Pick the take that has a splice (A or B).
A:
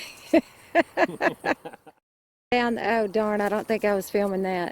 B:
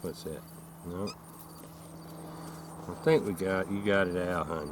A